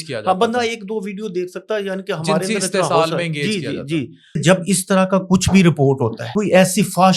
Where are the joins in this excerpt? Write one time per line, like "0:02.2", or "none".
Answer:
0:04.4
0:06.2